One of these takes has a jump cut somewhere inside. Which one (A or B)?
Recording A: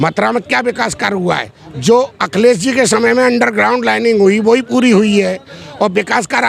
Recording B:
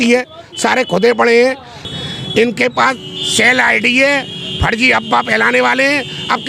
B